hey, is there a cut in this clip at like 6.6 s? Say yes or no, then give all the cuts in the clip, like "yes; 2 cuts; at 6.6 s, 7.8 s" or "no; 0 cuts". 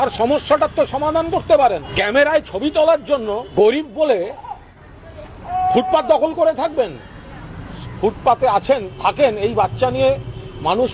no; 3 cuts; at 1.9 s, 3.5 s, 7.8 s